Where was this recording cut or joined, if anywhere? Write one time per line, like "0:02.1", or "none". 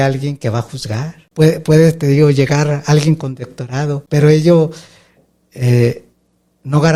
none